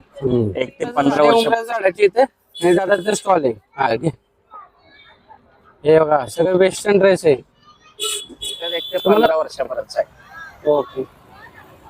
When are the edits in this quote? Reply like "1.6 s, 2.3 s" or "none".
1.3 s, 9.3 s

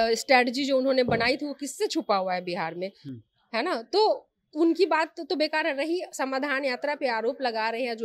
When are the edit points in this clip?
none

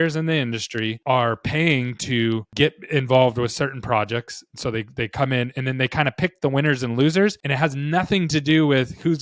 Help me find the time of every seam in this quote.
1.0 s, 2.5 s, 7.4 s

